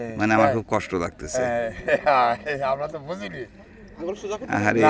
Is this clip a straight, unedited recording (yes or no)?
yes